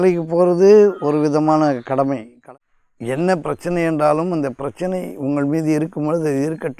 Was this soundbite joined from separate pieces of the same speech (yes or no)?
yes